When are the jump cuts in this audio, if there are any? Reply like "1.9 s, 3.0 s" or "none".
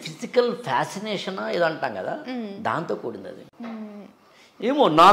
3.5 s